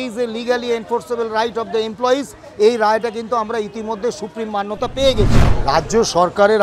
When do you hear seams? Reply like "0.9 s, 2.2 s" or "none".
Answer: 5.5 s